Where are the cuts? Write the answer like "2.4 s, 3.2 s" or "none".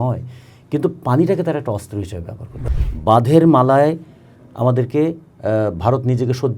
2.6 s